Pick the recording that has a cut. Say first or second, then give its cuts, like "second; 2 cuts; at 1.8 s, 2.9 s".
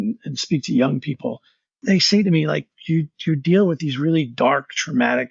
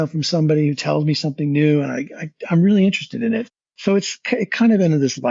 first; 1 cut; at 1.8 s